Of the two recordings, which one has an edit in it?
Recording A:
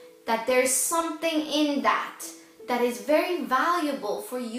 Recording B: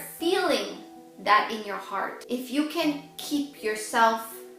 B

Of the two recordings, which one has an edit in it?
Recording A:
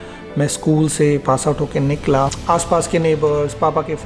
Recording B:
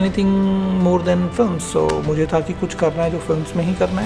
A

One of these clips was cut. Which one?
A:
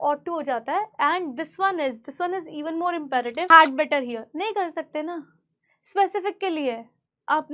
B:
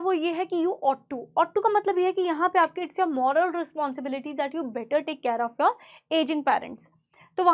A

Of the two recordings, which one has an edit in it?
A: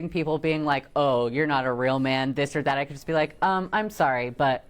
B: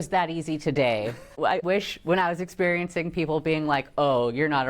B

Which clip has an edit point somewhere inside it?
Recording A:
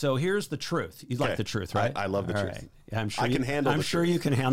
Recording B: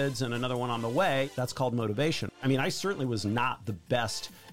B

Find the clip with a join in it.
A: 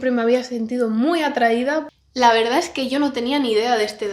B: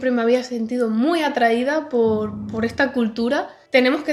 A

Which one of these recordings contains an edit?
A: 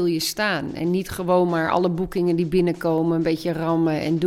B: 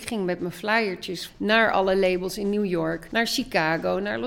B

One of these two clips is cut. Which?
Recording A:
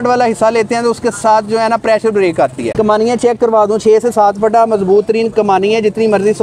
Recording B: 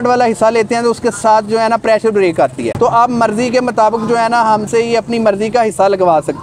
A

